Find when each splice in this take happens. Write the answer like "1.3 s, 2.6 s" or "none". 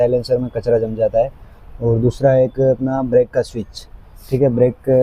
none